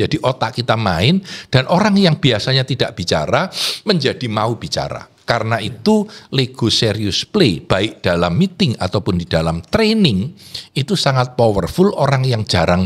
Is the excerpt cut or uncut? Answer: uncut